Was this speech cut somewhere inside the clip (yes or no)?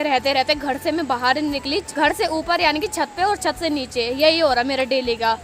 no